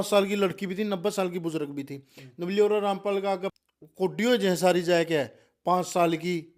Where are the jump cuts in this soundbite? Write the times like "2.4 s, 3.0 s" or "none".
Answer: 3.5 s